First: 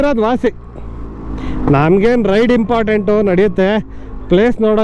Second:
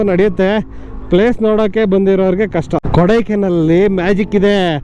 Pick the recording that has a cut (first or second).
second